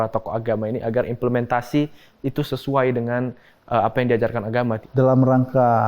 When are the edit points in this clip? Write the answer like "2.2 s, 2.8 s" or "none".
4.8 s